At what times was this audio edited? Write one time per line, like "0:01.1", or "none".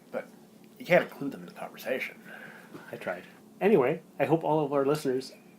0:03.4